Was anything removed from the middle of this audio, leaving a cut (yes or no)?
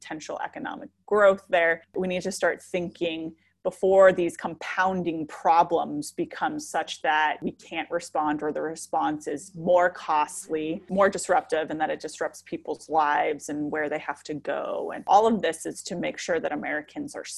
no